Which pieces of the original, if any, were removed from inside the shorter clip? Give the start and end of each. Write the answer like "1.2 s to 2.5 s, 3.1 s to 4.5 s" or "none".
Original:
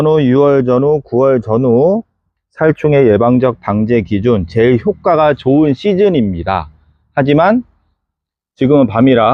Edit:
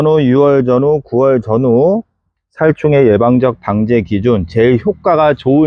none